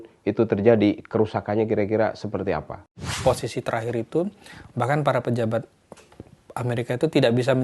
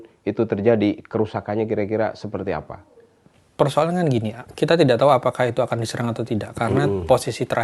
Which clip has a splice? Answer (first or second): first